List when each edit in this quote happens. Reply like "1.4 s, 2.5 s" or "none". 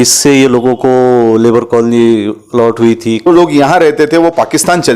3.3 s